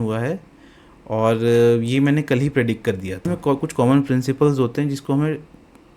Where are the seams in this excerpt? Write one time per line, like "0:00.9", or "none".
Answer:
0:03.3

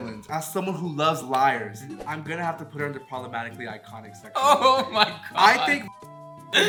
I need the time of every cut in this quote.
none

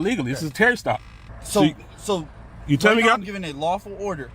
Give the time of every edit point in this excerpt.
0:01.2

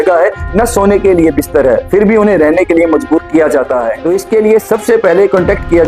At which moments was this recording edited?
0:04.0

